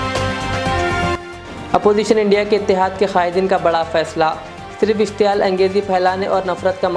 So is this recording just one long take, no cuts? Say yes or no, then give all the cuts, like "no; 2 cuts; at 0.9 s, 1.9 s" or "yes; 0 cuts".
yes; 0 cuts